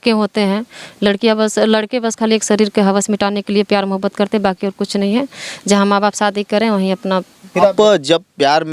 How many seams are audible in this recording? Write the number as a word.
one